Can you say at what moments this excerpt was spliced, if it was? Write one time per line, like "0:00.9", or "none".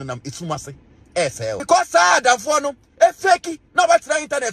0:01.6
0:03.6